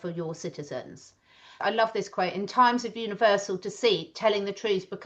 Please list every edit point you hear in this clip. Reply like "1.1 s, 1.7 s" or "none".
1.6 s